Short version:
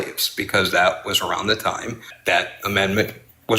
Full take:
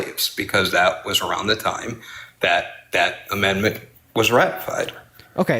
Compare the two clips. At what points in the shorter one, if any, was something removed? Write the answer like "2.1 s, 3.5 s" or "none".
2.1 s